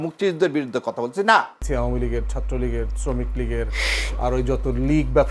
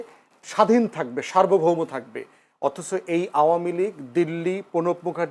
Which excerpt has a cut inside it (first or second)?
first